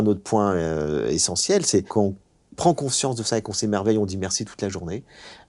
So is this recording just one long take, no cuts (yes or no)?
no